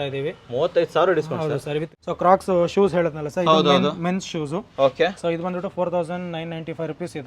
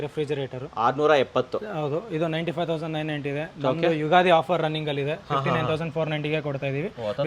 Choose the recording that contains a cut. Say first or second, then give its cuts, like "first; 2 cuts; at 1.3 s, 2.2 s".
first; 1 cut; at 1.9 s